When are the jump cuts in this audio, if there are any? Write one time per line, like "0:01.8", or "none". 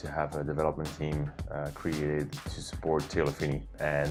none